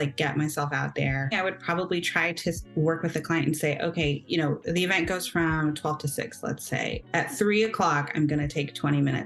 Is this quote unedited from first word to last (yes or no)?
no